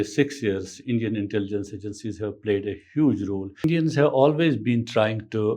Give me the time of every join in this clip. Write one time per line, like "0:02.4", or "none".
0:03.6